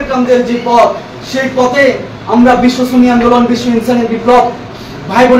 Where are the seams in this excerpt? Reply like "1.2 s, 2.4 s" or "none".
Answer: none